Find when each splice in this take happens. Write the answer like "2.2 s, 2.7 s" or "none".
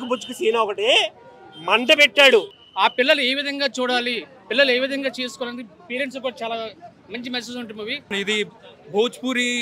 2.6 s, 8.1 s